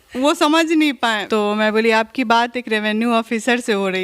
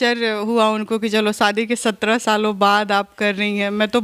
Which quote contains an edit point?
first; 1 cut; at 1.2 s

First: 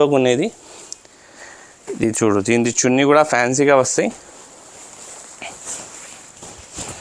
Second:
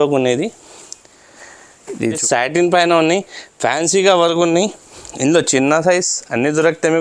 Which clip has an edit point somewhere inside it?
second; 1 cut; at 2.2 s

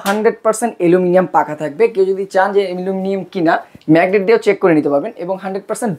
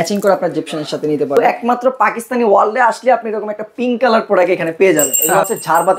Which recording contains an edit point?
second; 2 cuts; at 1.4 s, 5.2 s

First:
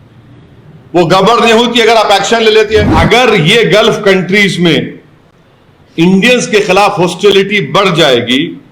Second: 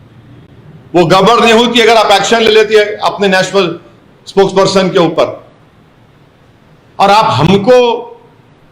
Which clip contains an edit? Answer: first; 1 cut; at 2.9 s

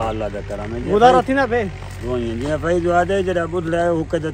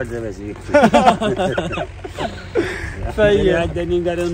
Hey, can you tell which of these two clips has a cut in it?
second; 1 cut; at 1.1 s

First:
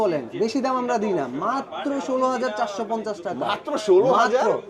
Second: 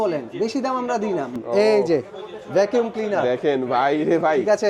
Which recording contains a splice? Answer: second; 1 cut; at 1.4 s

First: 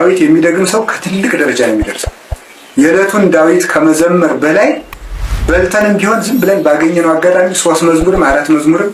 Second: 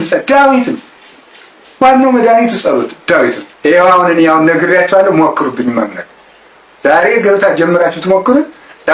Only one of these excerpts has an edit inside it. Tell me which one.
second; 1 cut; at 3.5 s

